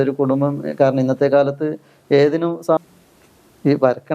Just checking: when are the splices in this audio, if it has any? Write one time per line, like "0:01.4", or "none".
0:02.8